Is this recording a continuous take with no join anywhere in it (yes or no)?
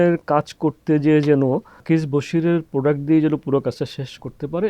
no